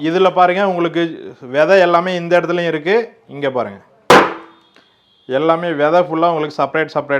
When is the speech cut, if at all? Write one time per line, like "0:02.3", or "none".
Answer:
none